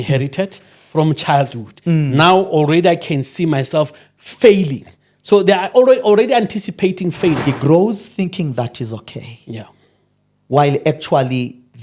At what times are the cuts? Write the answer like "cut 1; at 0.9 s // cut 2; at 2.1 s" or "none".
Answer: cut 1; at 7.4 s